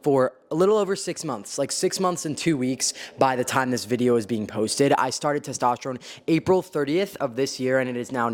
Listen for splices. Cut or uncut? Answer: uncut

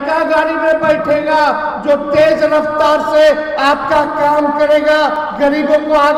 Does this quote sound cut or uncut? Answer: uncut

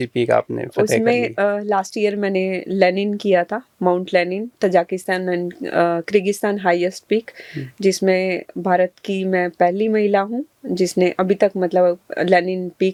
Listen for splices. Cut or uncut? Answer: uncut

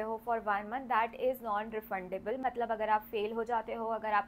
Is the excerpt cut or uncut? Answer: uncut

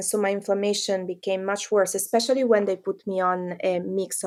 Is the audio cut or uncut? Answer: uncut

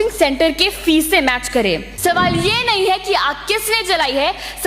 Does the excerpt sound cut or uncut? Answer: cut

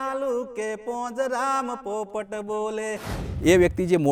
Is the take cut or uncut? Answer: cut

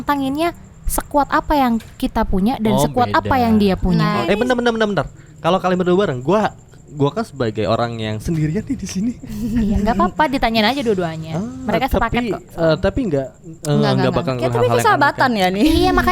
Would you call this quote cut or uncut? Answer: cut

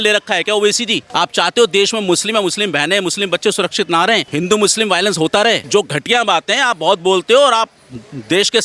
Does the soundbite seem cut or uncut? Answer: cut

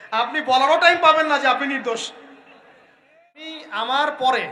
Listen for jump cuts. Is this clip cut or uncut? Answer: cut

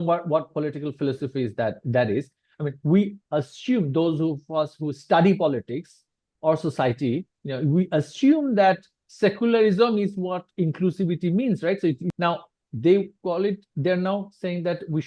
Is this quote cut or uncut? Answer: cut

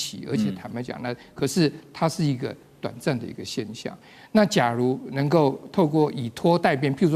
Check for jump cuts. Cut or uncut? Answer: uncut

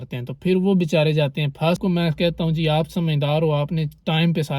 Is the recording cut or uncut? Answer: cut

